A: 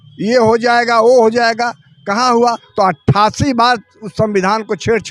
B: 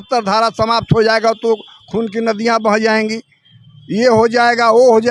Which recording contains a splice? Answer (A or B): A